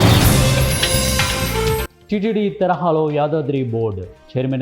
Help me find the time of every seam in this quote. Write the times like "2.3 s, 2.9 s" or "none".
1.9 s